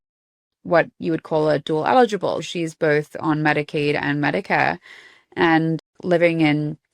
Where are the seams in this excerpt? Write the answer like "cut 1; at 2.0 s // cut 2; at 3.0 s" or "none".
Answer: cut 1; at 2.5 s // cut 2; at 5.9 s